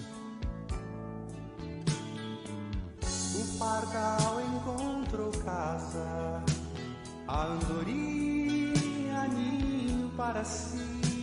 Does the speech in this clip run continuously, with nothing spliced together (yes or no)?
yes